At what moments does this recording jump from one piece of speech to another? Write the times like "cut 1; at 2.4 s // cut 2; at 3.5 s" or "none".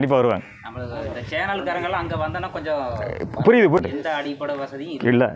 cut 1; at 3.8 s